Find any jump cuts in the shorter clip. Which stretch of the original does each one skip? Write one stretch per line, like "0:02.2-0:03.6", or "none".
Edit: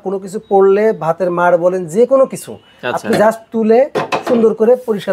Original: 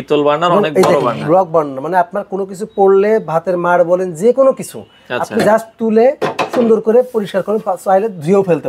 none